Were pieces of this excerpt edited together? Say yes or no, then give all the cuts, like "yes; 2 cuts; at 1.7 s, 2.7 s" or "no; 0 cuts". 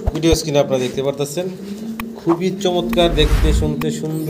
no; 0 cuts